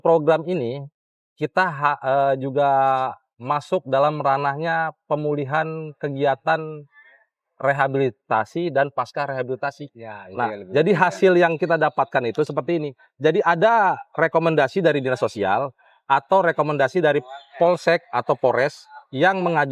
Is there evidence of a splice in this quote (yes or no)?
no